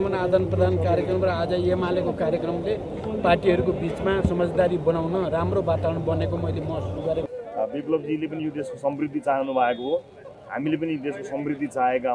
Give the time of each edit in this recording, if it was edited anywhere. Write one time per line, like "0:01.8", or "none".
0:07.3